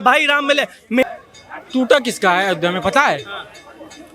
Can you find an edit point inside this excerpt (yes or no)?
yes